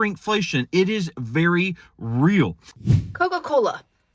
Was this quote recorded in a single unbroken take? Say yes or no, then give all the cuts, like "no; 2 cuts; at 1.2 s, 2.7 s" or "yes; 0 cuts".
no; 1 cut; at 2.6 s